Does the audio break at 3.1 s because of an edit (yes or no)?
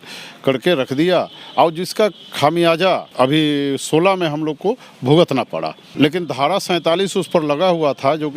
yes